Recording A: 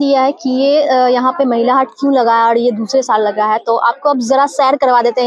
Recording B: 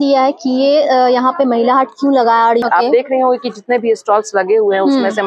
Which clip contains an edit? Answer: B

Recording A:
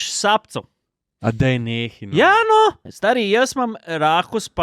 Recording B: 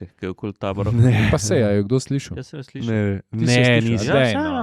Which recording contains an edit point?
A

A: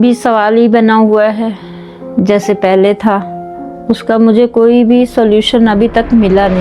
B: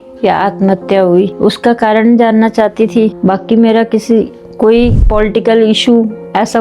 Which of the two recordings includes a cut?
B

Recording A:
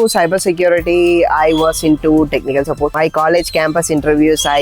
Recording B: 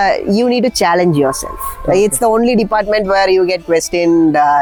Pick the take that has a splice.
A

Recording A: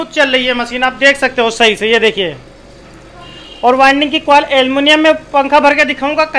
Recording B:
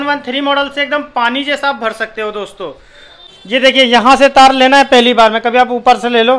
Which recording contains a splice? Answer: B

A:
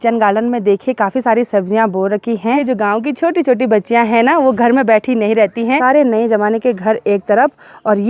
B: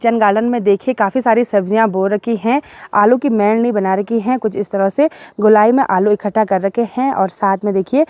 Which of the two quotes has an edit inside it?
A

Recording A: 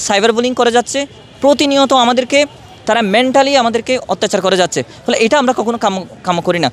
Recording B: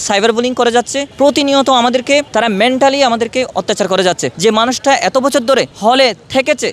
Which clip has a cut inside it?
B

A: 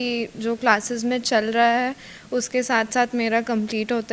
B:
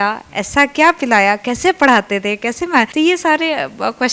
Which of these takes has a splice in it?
B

